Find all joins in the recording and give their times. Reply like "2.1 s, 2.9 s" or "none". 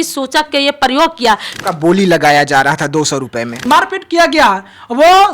1.5 s, 3.5 s